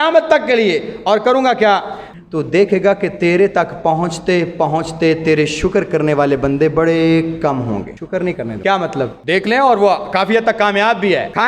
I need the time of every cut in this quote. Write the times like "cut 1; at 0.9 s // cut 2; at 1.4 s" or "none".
cut 1; at 2.1 s